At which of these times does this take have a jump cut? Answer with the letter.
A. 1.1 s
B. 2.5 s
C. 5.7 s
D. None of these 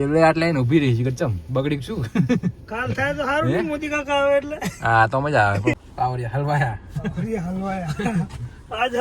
C